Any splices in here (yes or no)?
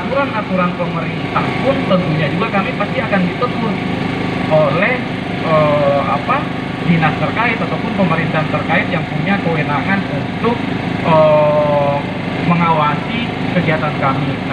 no